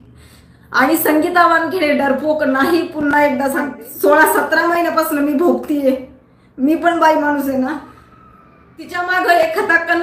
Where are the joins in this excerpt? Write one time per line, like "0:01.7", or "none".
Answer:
0:03.8
0:09.0